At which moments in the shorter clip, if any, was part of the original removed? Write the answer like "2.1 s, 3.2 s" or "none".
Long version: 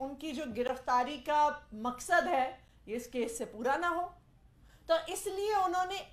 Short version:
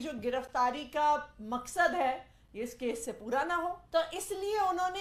3.8 s